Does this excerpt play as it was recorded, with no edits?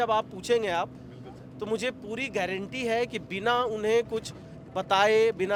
yes; 0 cuts

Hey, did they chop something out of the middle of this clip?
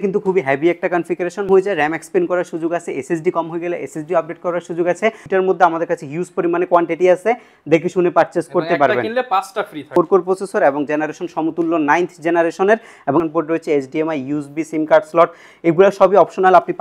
yes; 4 cuts; at 1.5 s, 5.2 s, 9.9 s, 13.2 s

